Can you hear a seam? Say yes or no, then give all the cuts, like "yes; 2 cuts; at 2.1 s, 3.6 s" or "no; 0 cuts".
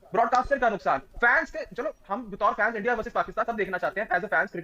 no; 0 cuts